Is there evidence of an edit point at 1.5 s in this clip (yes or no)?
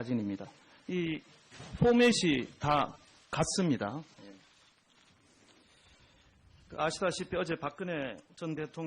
no